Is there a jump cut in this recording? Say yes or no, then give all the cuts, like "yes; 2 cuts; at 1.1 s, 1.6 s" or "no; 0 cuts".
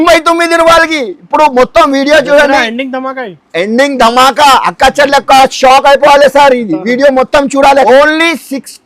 yes; 1 cut; at 7.8 s